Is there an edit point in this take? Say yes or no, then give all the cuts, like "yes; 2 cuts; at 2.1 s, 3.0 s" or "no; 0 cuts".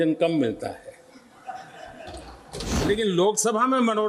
yes; 1 cut; at 2.8 s